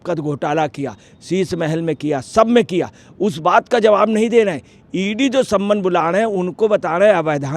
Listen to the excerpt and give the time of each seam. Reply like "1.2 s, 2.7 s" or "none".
none